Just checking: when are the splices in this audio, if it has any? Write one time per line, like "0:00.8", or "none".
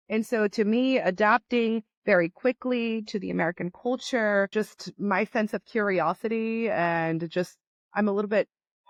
none